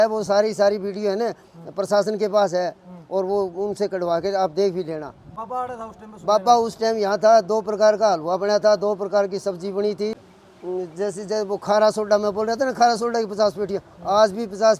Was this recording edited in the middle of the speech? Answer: yes; 1 cut; at 10.1 s

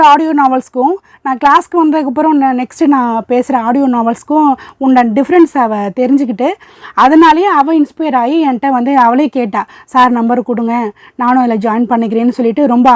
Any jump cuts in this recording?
no; 0 cuts

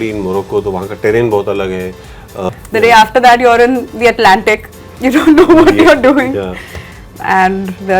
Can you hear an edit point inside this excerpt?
yes; 1 cut; at 2.4 s

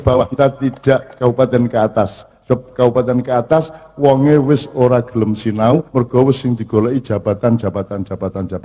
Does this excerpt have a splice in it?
no; 0 cuts

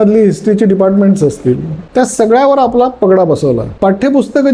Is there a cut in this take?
yes; 2 cuts; at 1.8 s, 3.7 s

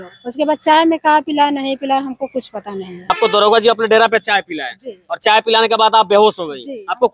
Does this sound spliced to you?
yes; 1 cut; at 3.2 s

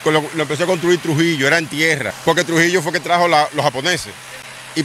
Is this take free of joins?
no; 1 cut; at 2.1 s

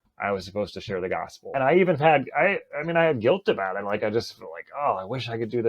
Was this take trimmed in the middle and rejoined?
yes; 1 cut; at 1.5 s

